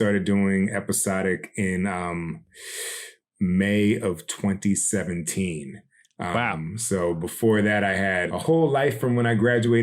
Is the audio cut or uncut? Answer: cut